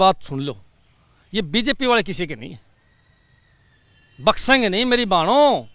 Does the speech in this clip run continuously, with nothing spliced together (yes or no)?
yes